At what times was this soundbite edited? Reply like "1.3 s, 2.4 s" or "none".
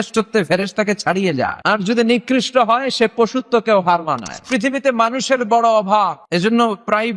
1.6 s, 4.5 s, 6.2 s